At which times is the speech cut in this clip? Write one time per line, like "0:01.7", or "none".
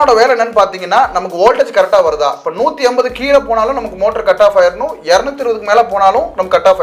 none